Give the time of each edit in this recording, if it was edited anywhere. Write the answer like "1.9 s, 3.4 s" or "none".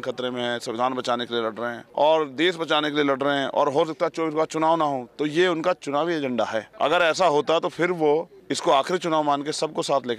1.8 s, 6.6 s, 8.4 s